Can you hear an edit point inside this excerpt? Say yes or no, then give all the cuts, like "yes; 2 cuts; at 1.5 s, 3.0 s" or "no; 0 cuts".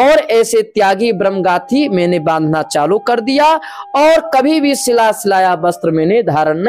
no; 0 cuts